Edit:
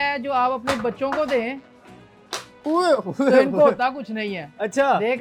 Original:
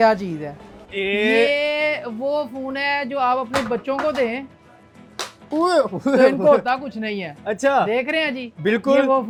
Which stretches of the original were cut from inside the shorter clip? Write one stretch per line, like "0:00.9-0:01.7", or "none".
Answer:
none